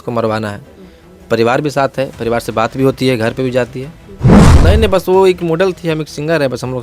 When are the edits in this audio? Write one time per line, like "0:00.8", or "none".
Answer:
0:04.4